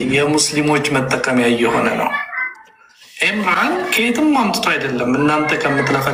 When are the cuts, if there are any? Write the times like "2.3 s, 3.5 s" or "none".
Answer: none